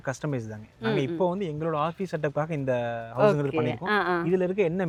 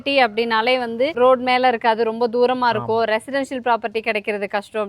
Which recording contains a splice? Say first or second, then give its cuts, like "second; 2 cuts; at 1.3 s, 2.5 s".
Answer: second; 1 cut; at 1.1 s